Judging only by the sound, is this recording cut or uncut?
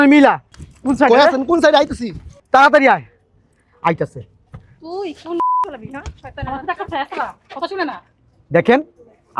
uncut